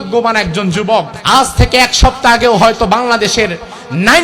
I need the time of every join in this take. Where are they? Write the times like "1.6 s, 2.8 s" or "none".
1.2 s